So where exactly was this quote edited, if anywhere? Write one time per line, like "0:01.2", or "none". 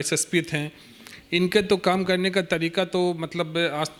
none